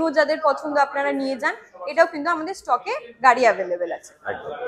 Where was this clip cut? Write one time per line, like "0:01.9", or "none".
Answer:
none